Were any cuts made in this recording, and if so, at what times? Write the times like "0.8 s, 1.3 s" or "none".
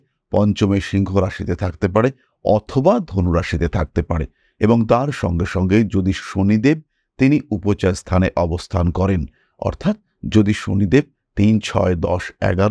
none